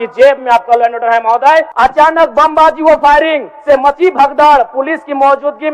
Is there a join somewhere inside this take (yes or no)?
yes